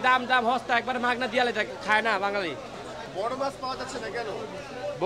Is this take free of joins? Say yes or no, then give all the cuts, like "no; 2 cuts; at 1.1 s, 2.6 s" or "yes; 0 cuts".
yes; 0 cuts